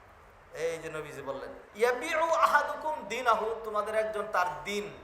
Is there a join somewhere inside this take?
yes; 1 cut; at 1.6 s

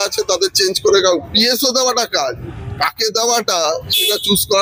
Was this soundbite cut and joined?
no; 0 cuts

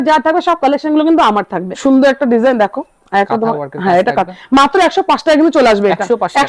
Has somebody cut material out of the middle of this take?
yes; 1 cut; at 1.8 s

